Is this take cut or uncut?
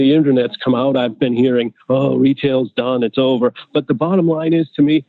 uncut